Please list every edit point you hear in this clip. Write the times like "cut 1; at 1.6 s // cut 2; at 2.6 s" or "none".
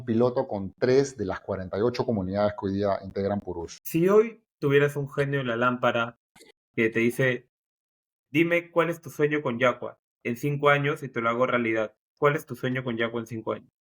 cut 1; at 3.7 s // cut 2; at 4.5 s